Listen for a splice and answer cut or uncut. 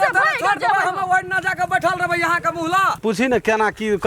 cut